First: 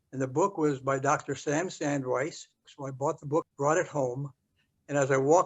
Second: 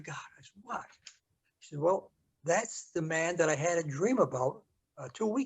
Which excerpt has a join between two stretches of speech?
first; 2 cuts; at 2.8 s, 3.5 s

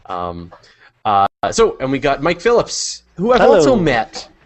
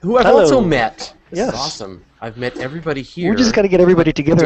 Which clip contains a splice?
first; 1 cut; at 1.9 s

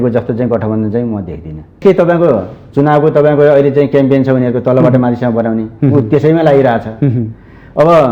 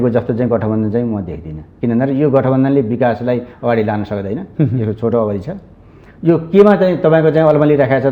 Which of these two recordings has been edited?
first; 1 cut; at 1.8 s

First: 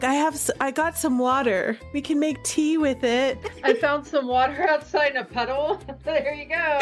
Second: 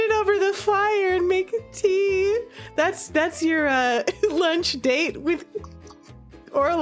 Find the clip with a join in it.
first; 2 cuts; at 1.8 s, 3.5 s

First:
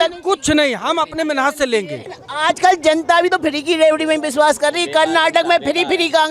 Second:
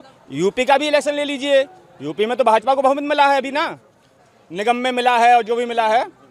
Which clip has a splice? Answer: first; 1 cut; at 2.0 s

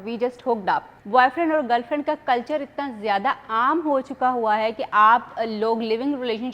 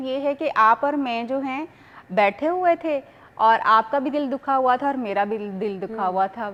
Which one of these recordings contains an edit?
first; 1 cut; at 0.9 s

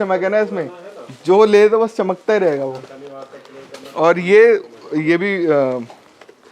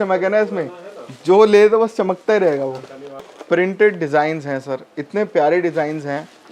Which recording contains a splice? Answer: second; 1 cut; at 3.3 s

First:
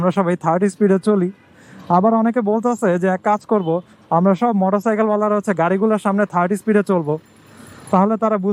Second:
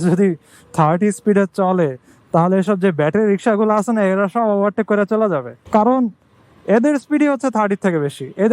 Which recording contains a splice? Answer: second; 1 cut; at 5.5 s

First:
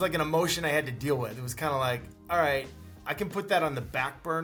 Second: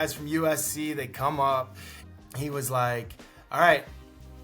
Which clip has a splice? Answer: second; 1 cut; at 2.1 s

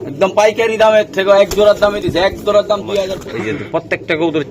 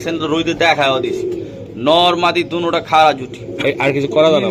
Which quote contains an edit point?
first; 1 cut; at 3.2 s

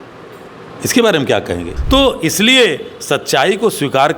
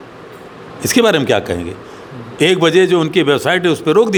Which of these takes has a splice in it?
first; 1 cut; at 1.7 s

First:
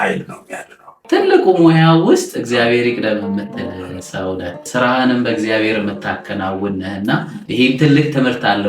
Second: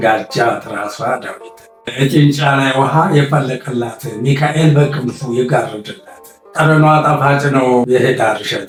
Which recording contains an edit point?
first; 1 cut; at 0.9 s

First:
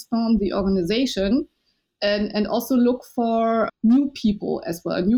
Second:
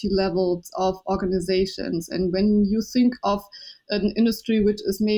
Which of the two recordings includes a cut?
first; 1 cut; at 3.7 s

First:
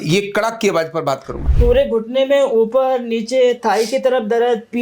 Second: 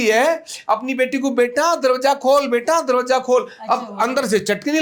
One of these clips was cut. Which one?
first; 1 cut; at 1.3 s

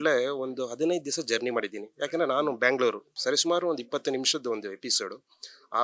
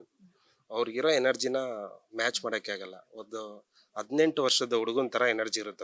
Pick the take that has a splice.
first; 1 cut; at 3.1 s

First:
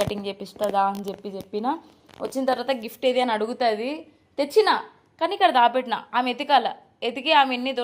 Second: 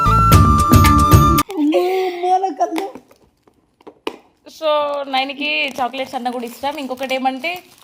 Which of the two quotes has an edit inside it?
second; 1 cut; at 1.4 s

